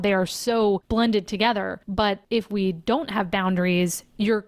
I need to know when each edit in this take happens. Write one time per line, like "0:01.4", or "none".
0:00.8
0:02.0